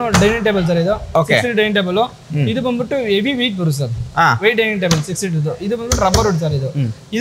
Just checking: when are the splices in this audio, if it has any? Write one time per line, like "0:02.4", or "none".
none